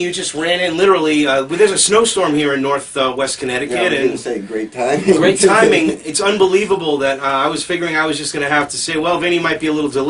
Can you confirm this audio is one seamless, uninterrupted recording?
yes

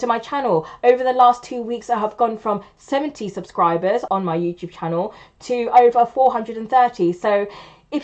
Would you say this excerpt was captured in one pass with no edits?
yes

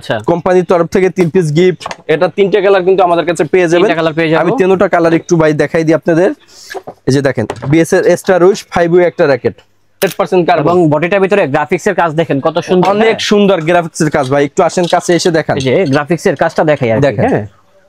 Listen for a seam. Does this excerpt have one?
yes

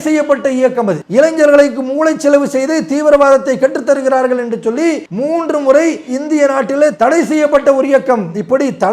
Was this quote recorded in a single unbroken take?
no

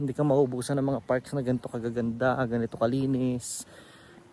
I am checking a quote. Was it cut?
no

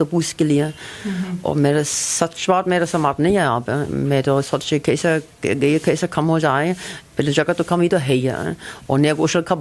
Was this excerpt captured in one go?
yes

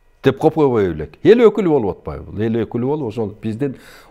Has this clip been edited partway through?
no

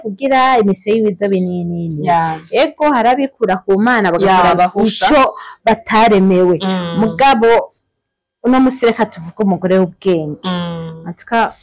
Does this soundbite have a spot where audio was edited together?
no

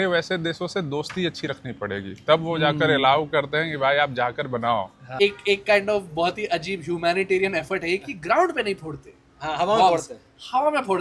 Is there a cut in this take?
yes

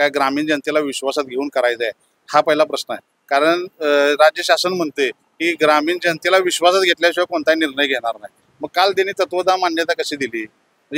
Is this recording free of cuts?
yes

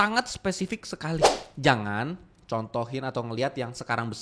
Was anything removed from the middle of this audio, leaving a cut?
yes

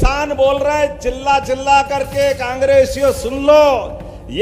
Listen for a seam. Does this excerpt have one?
no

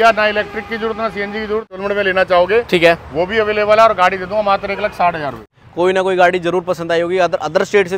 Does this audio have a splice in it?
yes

